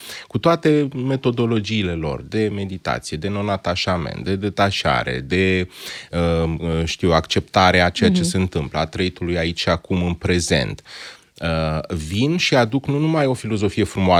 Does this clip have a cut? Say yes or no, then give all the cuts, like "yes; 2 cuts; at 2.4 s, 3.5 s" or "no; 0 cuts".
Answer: no; 0 cuts